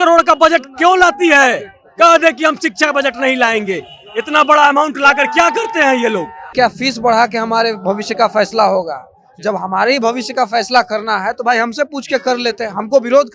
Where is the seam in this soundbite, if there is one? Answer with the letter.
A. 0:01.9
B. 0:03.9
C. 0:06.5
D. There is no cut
C